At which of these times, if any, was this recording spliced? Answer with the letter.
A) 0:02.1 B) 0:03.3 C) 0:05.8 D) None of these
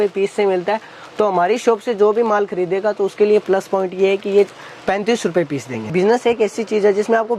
C